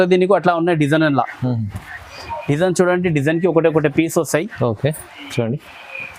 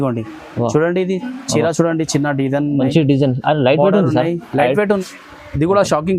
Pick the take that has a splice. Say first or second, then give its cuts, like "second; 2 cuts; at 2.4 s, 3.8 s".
second; 1 cut; at 5.0 s